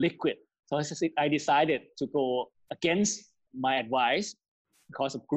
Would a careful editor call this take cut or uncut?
cut